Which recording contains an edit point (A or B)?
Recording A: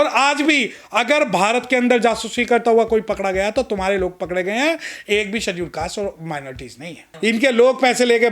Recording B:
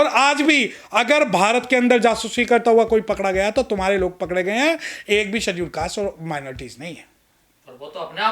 A